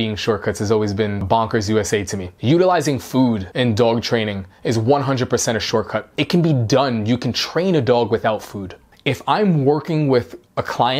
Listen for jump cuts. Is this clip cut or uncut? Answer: cut